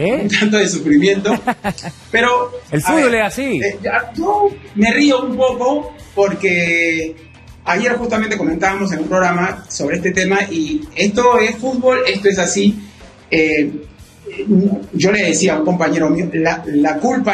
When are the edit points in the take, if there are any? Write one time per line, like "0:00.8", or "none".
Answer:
none